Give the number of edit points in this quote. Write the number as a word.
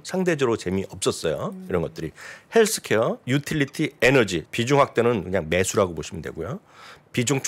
two